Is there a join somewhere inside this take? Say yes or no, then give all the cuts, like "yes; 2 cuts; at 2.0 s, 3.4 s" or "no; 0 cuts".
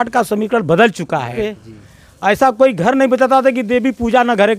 yes; 1 cut; at 1.4 s